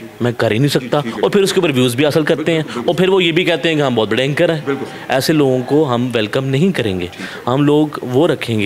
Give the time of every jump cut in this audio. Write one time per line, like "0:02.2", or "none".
none